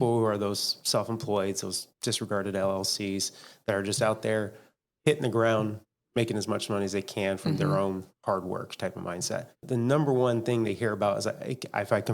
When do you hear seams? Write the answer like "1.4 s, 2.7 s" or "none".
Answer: 9.6 s